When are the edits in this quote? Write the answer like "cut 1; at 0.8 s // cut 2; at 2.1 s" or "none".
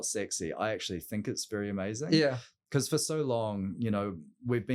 none